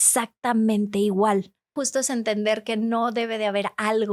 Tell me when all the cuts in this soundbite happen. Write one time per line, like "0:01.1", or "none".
0:01.7